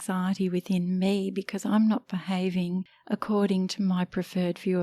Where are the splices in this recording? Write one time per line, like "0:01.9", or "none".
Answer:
0:02.9

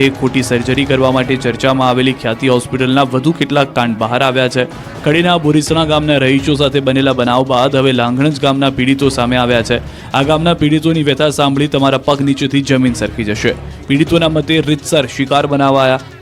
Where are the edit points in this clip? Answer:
0:08.4

